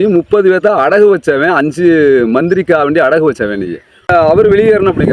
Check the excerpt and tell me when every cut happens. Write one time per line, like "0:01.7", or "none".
0:04.1